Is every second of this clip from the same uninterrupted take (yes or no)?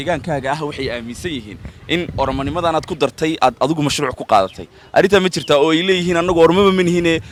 yes